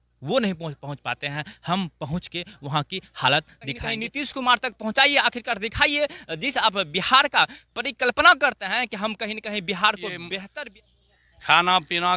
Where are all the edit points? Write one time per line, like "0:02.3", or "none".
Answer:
0:03.9
0:10.5